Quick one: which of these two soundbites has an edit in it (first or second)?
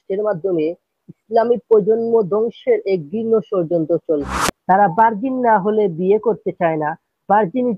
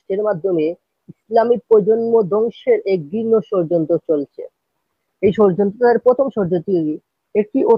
first